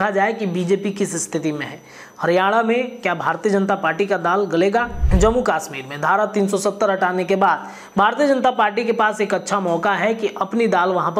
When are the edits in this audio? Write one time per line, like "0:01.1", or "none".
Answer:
0:05.0